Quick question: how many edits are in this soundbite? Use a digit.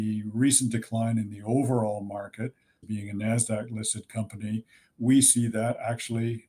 1